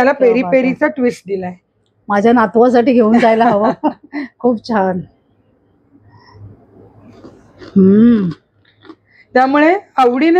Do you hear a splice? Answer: no; 0 cuts

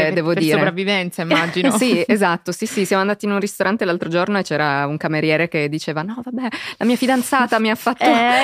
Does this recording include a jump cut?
no; 0 cuts

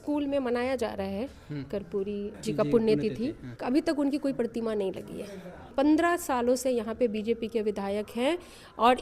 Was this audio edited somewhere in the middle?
yes; 3 cuts; at 2.4 s, 3.5 s, 5.7 s

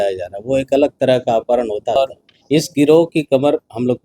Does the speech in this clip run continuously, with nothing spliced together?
no; 1 cut; at 2.0 s

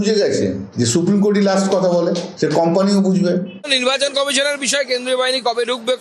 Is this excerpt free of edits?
no; 1 cut; at 3.6 s

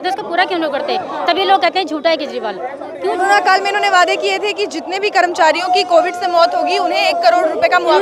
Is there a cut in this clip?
no; 0 cuts

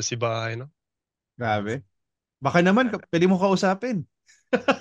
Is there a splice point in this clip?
no; 0 cuts

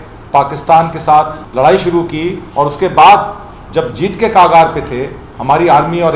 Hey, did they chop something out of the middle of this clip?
yes; 1 cut; at 1.4 s

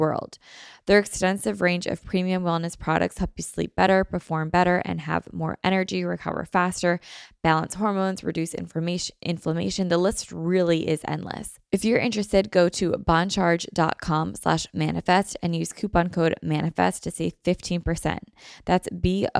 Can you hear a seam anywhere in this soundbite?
yes; 1 cut; at 11.5 s

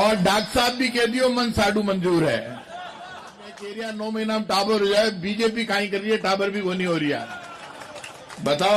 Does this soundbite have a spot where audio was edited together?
yes; 1 cut; at 3.7 s

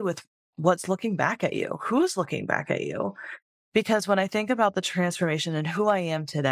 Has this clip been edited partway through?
no; 0 cuts

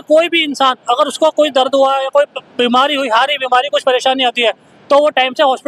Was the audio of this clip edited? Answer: no; 0 cuts

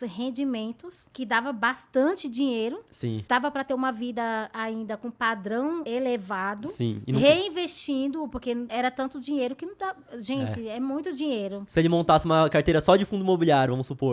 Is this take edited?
no; 0 cuts

